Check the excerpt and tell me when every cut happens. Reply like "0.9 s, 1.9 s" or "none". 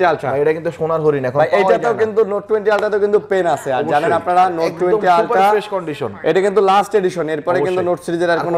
none